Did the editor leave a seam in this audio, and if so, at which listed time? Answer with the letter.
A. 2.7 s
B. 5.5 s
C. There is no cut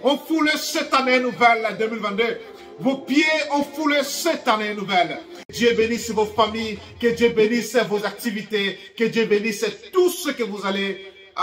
B